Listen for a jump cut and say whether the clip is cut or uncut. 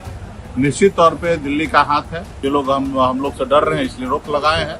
cut